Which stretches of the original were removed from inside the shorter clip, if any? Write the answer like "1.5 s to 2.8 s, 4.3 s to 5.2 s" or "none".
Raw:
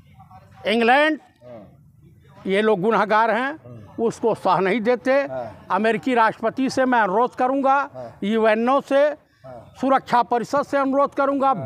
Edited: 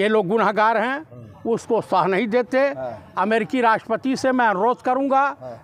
none